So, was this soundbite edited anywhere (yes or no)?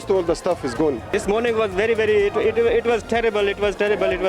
yes